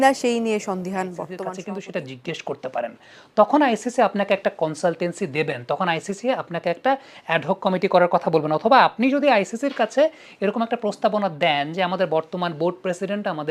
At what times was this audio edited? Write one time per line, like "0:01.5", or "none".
0:01.4

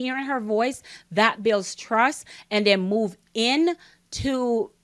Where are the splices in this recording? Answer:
0:02.3

